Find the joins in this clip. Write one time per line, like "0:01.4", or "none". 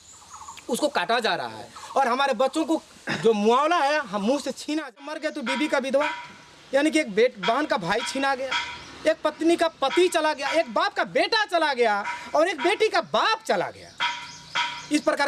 0:05.2

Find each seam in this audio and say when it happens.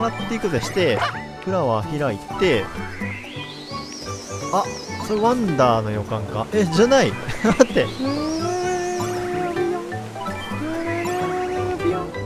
none

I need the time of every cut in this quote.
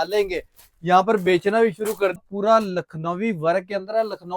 0:02.2

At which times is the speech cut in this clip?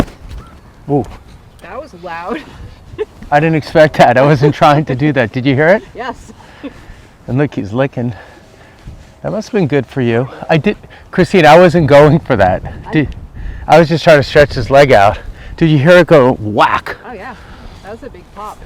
none

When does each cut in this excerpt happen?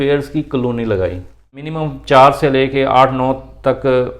0:01.7

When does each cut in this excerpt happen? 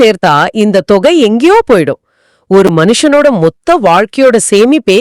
none

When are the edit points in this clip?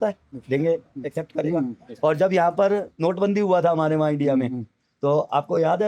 none

